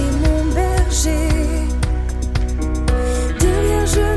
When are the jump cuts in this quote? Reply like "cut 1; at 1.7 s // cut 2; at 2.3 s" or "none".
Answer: none